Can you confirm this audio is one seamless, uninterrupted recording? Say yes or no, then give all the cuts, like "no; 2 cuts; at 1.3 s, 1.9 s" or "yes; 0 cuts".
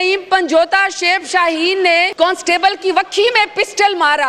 no; 1 cut; at 2.1 s